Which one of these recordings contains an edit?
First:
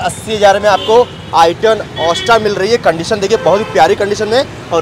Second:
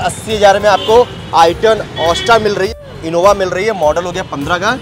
second; 1 cut; at 2.7 s

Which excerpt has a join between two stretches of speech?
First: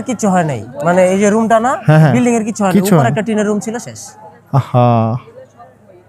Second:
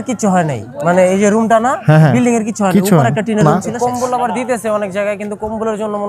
second; 1 cut; at 3.4 s

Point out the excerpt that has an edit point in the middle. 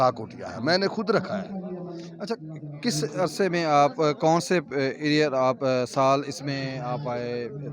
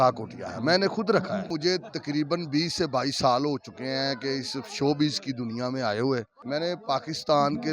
second; 2 cuts; at 1.5 s, 6.3 s

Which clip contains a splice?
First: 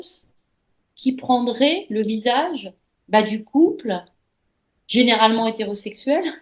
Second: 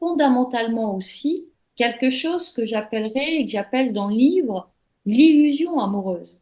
second; 1 cut; at 1.6 s

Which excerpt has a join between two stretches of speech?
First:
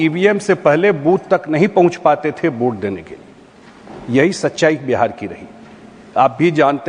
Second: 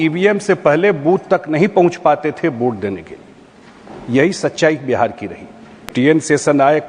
second; 1 cut; at 5.9 s

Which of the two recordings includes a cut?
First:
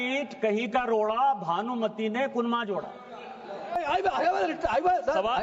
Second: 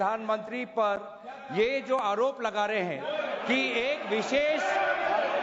first; 1 cut; at 3.8 s

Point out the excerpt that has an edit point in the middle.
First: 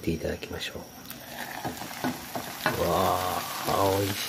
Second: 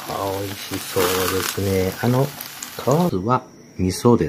second; 1 cut; at 3.1 s

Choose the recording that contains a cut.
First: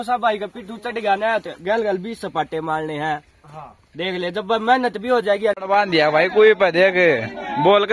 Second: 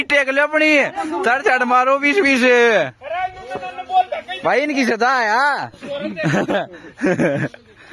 first; 1 cut; at 5.6 s

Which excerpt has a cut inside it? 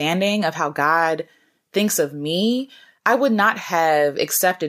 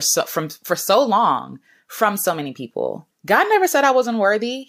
second; 1 cut; at 3.1 s

